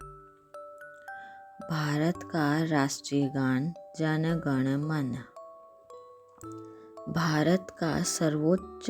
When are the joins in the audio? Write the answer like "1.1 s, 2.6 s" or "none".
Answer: 1.2 s, 5.3 s, 6.7 s